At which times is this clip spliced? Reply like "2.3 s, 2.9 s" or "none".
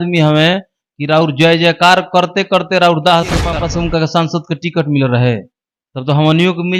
3.5 s